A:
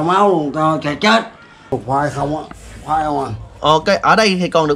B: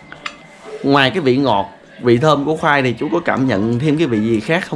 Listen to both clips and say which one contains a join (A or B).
A